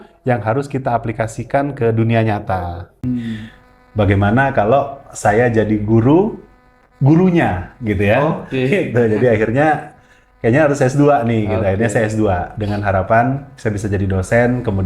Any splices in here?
yes; 1 cut; at 2.9 s

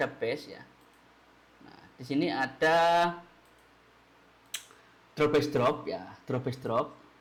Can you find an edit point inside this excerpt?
no; 0 cuts

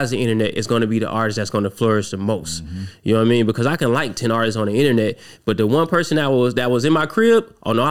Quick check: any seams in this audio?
no; 0 cuts

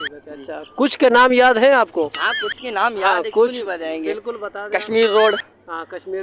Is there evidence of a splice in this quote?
no; 0 cuts

